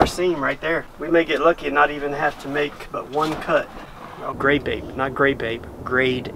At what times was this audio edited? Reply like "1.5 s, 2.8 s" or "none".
0.9 s, 4.3 s